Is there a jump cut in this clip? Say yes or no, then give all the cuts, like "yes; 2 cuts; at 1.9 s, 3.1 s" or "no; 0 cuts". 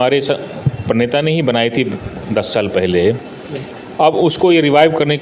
no; 0 cuts